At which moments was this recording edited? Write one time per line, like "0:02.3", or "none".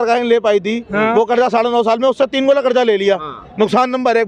none